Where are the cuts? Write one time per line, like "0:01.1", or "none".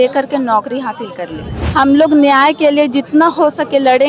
0:01.6